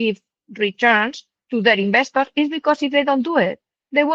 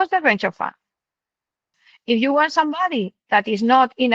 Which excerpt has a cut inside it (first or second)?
second